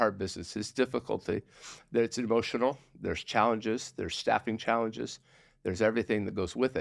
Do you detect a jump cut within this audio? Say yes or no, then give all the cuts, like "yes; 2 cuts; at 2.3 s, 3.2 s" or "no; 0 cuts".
no; 0 cuts